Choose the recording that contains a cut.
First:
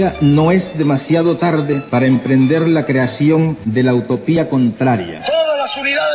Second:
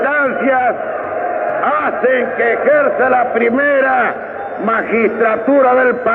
first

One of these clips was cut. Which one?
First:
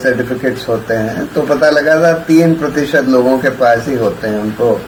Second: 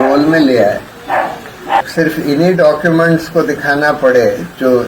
second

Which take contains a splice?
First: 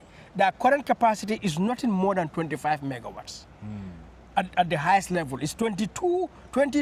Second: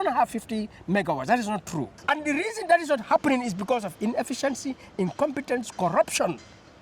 second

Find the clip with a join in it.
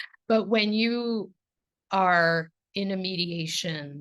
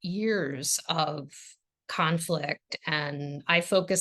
second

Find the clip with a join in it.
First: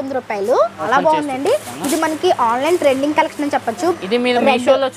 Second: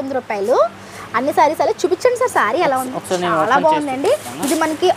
first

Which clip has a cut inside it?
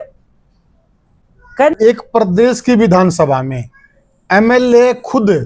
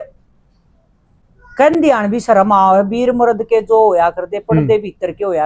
first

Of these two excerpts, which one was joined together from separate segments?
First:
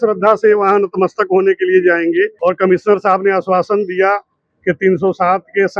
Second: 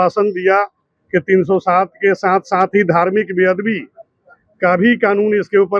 first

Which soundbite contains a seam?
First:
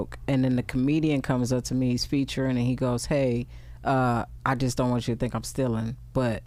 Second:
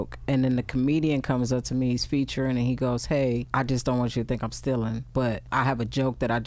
second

